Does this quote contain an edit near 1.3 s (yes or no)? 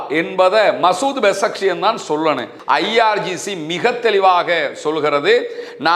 no